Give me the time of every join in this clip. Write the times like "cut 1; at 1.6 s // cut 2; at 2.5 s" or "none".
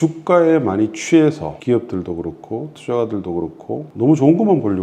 cut 1; at 1.5 s // cut 2; at 3.9 s